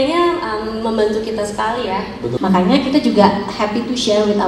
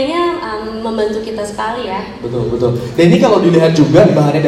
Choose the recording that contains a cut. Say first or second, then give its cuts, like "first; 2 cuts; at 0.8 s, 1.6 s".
first; 1 cut; at 2.3 s